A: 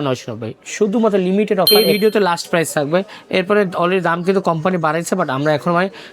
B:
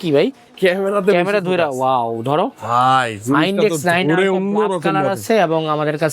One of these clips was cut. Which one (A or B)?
A